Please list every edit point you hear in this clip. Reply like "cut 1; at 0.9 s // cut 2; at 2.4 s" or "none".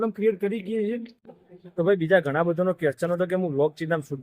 cut 1; at 1.1 s